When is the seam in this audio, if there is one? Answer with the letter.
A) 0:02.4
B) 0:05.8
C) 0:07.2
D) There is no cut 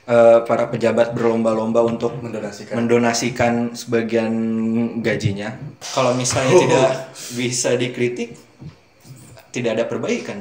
B